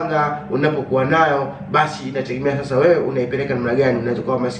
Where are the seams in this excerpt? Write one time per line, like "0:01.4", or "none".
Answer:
none